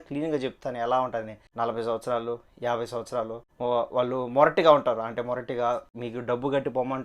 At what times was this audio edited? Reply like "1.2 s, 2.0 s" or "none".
1.4 s, 5.9 s

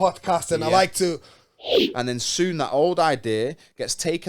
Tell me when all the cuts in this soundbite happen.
1.8 s

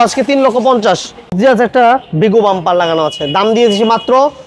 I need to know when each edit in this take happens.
1.3 s

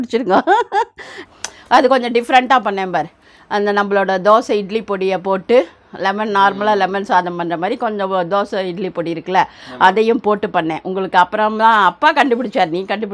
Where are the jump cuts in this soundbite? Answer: 1.1 s

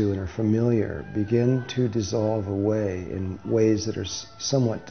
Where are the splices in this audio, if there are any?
1.7 s

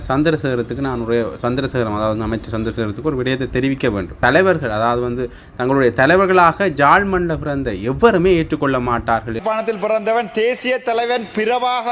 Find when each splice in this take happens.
4.1 s, 9.4 s

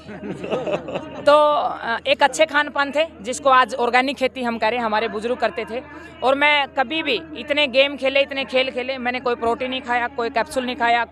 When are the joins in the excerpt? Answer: none

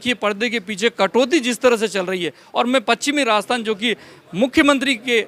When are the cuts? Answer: none

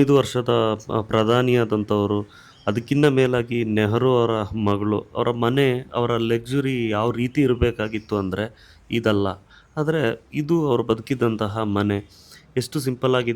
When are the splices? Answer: none

